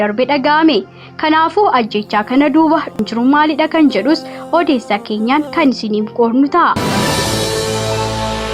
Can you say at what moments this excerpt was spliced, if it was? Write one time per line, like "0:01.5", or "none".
0:02.9
0:06.8